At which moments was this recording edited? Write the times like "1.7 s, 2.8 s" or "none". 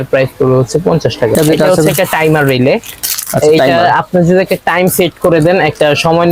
1.3 s